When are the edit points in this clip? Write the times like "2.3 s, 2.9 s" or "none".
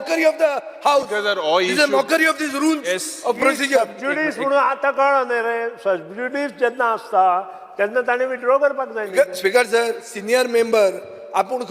none